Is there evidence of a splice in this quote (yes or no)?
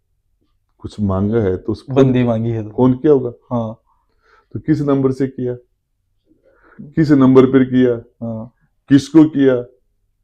no